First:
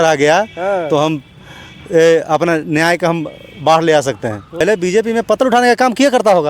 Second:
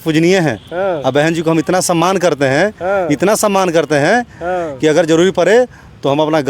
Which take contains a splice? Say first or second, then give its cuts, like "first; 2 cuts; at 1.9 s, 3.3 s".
first; 1 cut; at 4.6 s